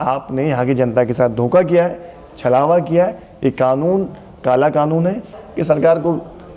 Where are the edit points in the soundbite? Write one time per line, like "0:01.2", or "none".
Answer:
0:05.3

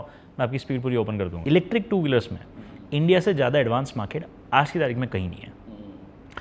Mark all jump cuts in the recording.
0:01.3

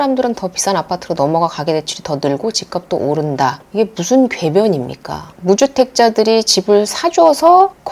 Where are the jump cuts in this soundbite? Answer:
0:03.6
0:05.4

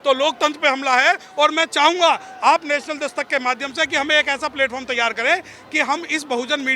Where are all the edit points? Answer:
none

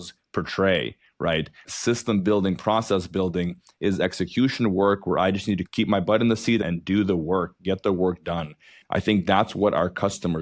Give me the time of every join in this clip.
0:06.6

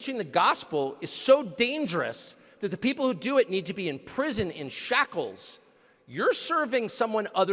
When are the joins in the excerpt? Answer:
none

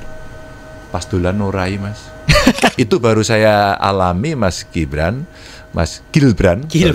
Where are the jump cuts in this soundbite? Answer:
0:02.7

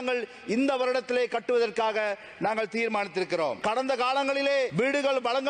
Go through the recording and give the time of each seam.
0:03.6
0:04.7

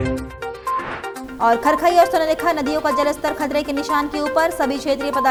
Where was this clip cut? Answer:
none

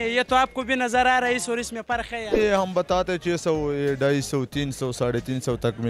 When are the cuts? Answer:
0:02.4

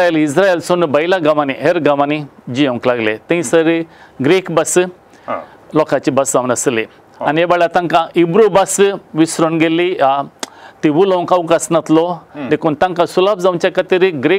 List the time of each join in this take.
none

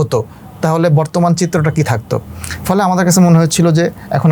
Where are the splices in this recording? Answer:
none

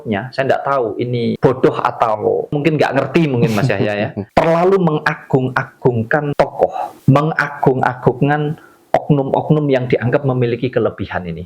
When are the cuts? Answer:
0:01.4
0:02.6
0:04.2
0:06.5

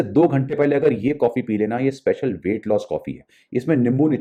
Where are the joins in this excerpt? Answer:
none

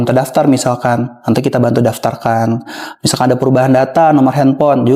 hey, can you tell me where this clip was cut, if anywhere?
none

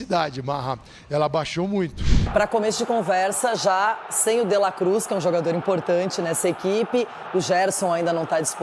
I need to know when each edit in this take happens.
0:02.3

